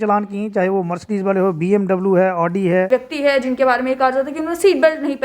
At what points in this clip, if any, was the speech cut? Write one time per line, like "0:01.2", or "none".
0:02.9

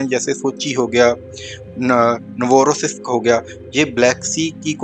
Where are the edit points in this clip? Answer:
none

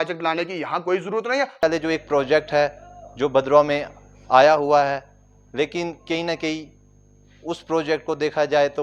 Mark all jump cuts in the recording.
0:01.6

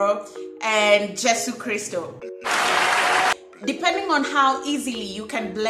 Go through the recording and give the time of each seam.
0:02.2
0:03.3

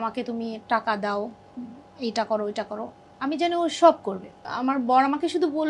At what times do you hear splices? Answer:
0:04.5

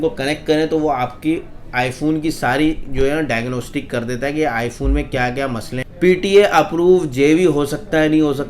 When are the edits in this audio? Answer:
0:05.8

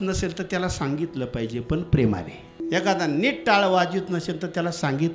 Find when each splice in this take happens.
0:02.6

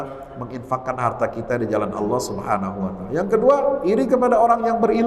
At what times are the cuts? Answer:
none

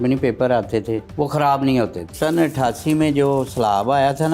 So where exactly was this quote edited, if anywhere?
0:01.1
0:02.1

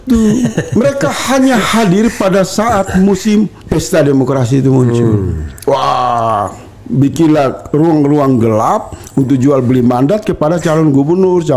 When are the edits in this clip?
none

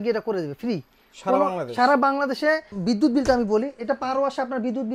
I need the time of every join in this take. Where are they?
0:02.7

